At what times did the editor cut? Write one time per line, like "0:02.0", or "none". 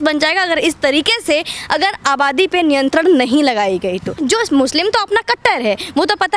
0:04.2